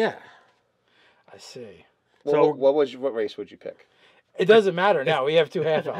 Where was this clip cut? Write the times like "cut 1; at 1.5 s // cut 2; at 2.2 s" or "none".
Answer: cut 1; at 2.5 s